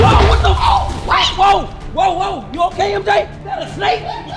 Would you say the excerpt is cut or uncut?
cut